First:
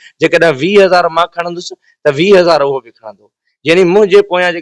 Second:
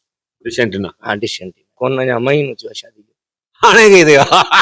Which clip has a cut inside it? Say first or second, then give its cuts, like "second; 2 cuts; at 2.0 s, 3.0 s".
second; 1 cut; at 1.8 s